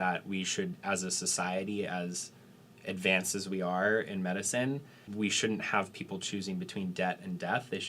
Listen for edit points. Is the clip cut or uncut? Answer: cut